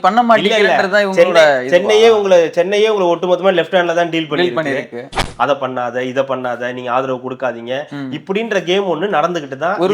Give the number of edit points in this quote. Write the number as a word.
one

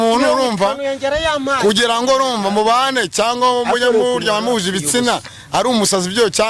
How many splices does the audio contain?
zero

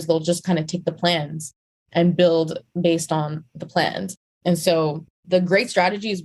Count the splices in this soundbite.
two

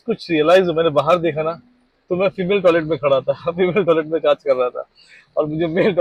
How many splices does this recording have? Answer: zero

